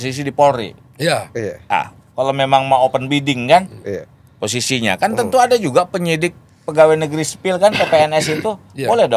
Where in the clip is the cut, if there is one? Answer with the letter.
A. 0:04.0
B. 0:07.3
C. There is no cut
C